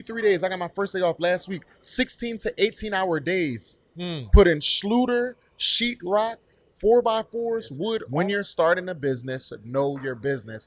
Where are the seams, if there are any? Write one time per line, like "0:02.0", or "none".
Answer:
0:08.0